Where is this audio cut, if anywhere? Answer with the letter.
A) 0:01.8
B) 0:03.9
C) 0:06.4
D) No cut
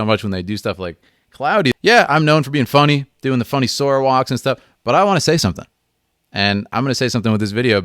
A